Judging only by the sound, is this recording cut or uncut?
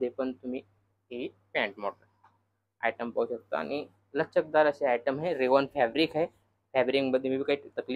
uncut